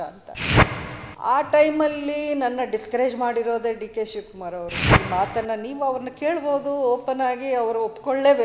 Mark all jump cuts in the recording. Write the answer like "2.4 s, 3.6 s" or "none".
4.9 s